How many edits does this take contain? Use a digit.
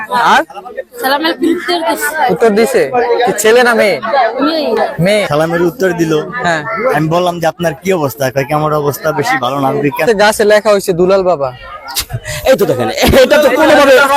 2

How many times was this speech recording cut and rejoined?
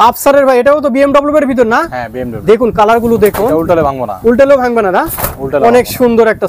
0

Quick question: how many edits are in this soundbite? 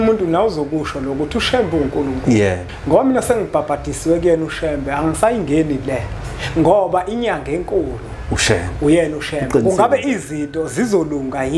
1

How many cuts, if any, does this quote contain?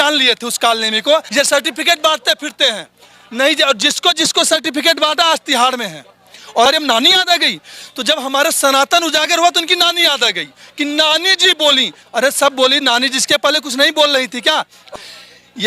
3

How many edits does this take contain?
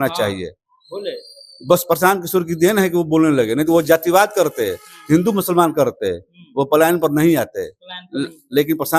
0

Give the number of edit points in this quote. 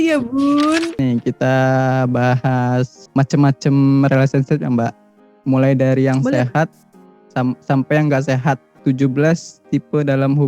3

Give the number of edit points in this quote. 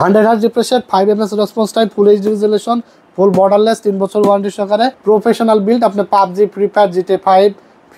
1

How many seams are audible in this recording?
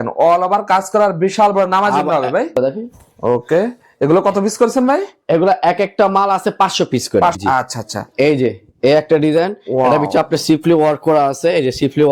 2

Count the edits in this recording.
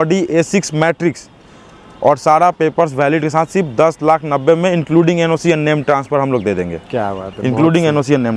0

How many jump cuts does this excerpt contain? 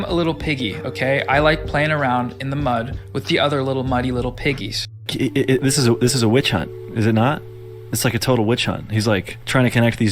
1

